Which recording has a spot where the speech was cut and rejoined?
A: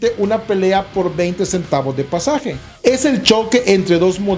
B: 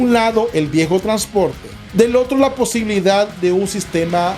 B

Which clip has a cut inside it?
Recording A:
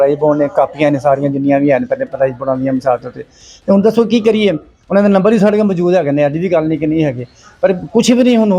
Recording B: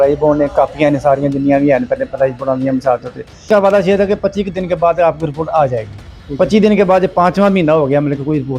B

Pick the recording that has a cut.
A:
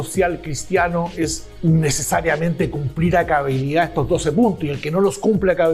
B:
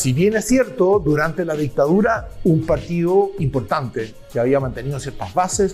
A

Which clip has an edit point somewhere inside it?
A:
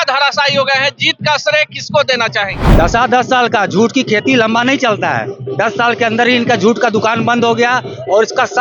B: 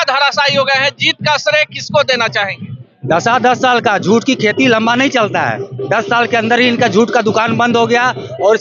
A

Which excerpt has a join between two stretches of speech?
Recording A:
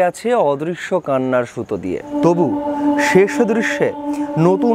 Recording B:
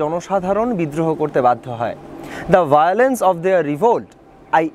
A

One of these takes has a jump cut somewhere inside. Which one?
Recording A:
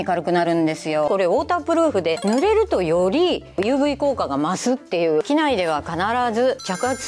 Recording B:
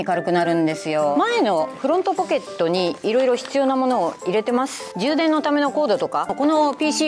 A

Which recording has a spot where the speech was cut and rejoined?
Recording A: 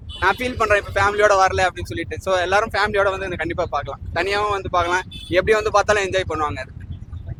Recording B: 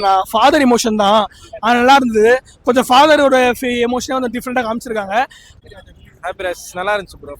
B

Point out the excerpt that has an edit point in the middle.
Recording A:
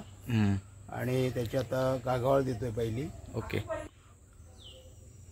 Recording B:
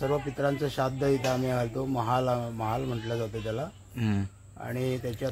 A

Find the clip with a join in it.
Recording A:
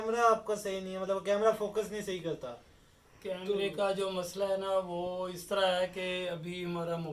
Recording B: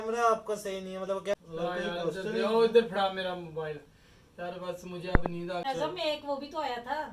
B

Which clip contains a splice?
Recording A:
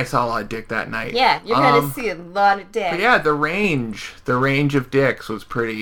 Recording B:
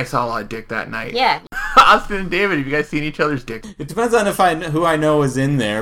B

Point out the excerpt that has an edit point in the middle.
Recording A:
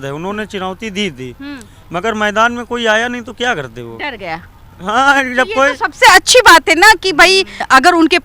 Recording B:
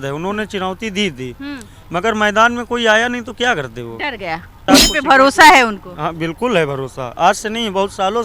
B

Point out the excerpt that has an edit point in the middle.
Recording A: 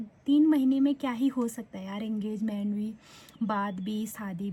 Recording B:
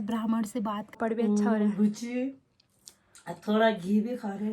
B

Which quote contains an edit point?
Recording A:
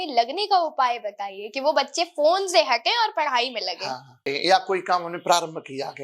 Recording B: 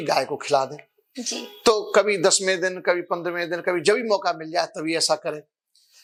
A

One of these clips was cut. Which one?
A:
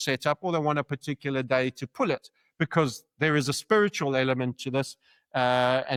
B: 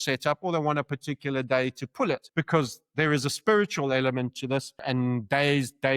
B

